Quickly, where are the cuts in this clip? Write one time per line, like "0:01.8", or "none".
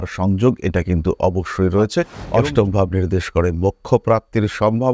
0:02.2